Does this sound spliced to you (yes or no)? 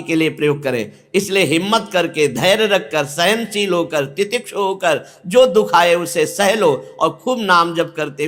no